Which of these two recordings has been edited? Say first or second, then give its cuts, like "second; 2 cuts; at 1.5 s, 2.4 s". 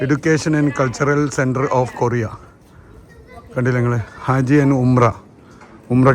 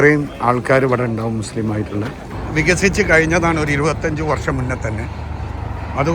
second; 1 cut; at 2.4 s